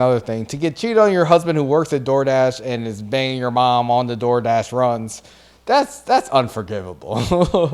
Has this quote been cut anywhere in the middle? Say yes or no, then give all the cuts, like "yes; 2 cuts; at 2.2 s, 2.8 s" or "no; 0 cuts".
no; 0 cuts